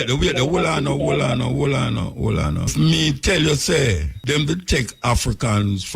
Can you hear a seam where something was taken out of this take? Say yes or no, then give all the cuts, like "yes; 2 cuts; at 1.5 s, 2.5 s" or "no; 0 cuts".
yes; 2 cuts; at 2.7 s, 4.1 s